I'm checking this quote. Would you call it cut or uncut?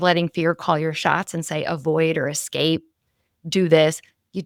uncut